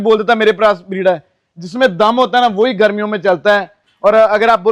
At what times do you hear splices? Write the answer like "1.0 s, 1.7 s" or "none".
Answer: 3.8 s